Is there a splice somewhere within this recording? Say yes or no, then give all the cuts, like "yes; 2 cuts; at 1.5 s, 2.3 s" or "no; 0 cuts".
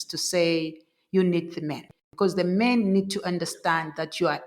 yes; 1 cut; at 1.9 s